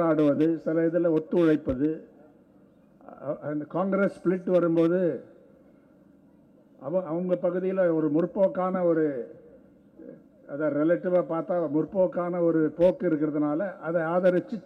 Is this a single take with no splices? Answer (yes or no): yes